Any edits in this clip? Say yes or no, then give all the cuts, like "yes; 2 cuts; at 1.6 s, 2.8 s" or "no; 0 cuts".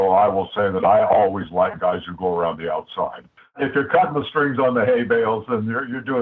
yes; 1 cut; at 3.6 s